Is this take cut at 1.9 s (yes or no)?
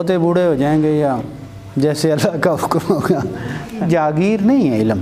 no